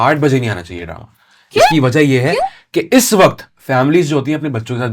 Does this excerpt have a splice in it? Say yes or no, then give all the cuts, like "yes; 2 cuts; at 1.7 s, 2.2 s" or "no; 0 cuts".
no; 0 cuts